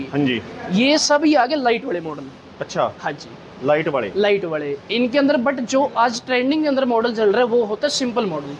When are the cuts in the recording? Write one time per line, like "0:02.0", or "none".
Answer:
none